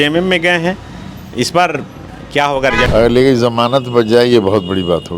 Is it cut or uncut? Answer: cut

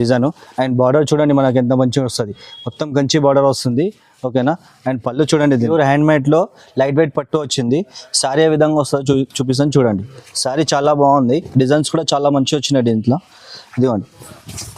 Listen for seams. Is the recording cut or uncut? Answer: cut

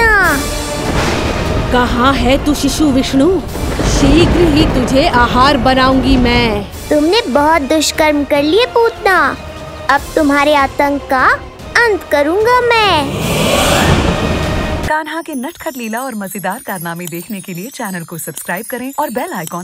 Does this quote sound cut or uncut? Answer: cut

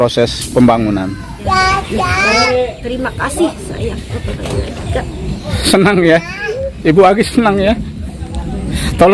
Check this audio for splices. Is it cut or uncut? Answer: cut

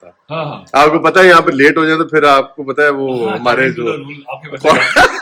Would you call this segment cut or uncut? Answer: uncut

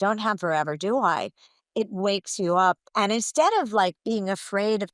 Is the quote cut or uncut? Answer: cut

